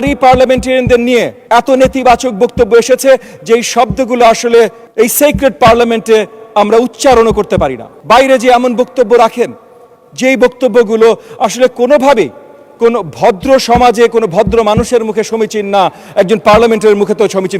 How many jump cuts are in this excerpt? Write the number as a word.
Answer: three